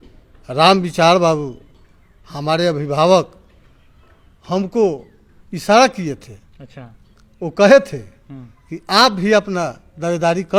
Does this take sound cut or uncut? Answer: uncut